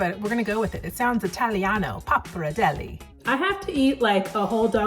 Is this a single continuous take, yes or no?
no